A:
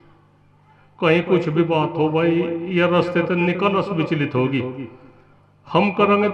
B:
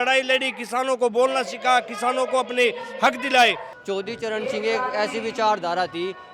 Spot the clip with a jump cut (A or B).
B